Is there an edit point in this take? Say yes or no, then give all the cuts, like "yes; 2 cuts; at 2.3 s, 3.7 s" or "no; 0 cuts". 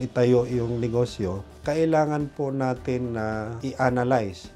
yes; 2 cuts; at 1.5 s, 3.6 s